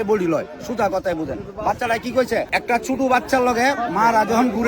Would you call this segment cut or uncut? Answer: cut